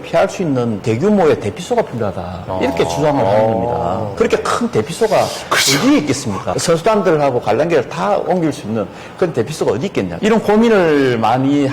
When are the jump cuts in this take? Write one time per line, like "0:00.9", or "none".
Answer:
none